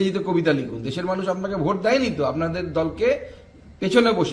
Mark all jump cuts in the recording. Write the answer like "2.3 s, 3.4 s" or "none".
none